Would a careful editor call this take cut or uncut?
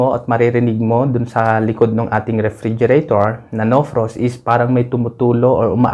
uncut